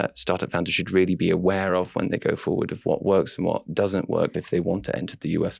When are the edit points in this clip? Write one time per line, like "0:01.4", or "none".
0:04.3